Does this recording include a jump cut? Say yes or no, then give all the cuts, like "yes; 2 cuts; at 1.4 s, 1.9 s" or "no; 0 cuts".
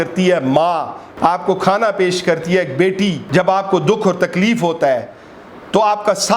yes; 2 cuts; at 1.0 s, 3.2 s